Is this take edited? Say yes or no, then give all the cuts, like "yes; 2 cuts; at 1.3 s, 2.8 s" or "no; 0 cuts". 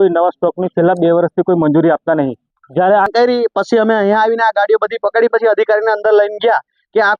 yes; 1 cut; at 3.1 s